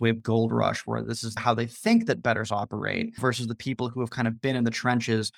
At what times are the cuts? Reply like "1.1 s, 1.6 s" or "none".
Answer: 1.4 s